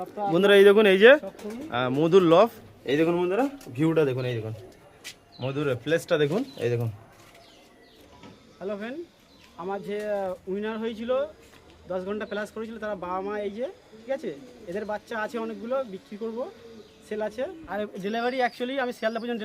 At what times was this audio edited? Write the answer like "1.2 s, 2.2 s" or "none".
2.7 s, 8.0 s, 17.6 s